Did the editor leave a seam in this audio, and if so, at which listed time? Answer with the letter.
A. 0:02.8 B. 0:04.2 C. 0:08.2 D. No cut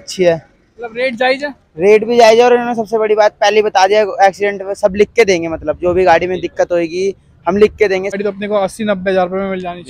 C